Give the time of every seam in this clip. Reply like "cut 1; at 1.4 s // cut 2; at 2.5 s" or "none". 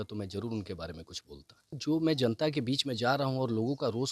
cut 1; at 1.8 s